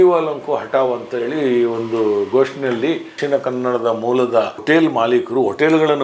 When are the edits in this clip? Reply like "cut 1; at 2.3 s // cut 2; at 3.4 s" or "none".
cut 1; at 3.1 s // cut 2; at 4.6 s